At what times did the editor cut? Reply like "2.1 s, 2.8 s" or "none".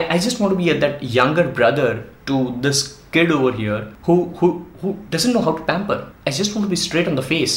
3.9 s, 6.1 s